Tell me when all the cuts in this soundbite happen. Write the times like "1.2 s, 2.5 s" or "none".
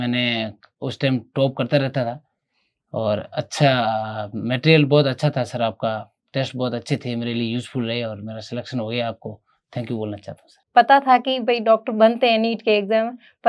10.6 s